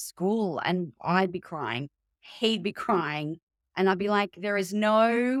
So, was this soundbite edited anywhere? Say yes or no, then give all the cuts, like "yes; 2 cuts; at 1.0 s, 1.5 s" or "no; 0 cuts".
no; 0 cuts